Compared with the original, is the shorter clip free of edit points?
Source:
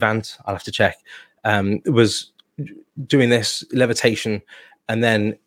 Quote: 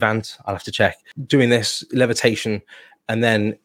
no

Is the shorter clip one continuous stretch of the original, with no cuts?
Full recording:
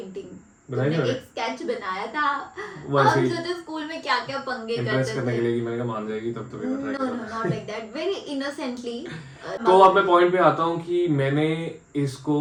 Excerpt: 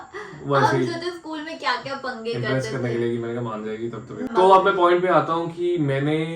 no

